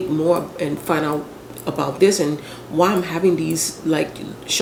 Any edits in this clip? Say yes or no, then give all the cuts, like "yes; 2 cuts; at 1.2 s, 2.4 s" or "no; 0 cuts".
no; 0 cuts